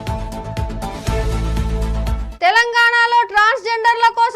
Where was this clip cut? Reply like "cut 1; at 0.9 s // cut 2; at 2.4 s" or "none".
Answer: cut 1; at 2.2 s

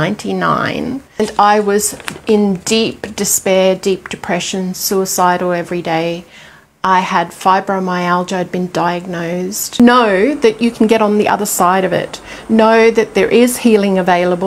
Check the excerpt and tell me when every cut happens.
cut 1; at 1.2 s // cut 2; at 9.7 s

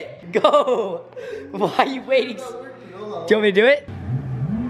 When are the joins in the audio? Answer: none

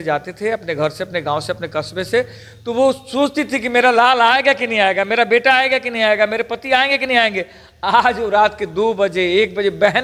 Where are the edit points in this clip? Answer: none

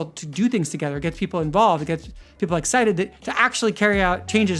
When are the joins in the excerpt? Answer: none

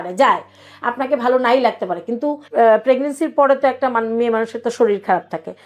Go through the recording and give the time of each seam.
cut 1; at 2.4 s

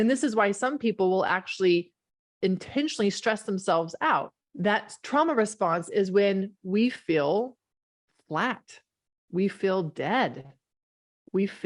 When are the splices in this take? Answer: cut 1; at 4.4 s

